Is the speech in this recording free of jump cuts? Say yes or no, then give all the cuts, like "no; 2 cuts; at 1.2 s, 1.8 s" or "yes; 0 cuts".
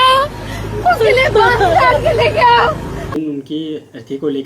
no; 1 cut; at 3.1 s